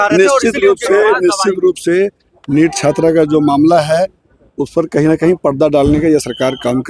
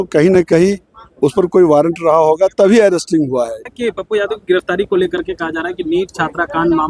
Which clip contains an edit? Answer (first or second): second